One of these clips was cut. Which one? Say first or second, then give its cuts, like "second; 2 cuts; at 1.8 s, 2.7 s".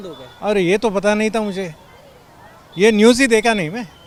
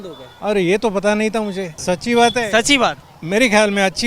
second; 2 cuts; at 1.7 s, 3.1 s